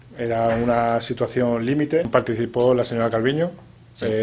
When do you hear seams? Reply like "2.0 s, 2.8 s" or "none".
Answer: 2.1 s